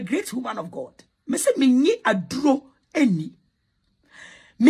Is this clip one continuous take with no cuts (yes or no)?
yes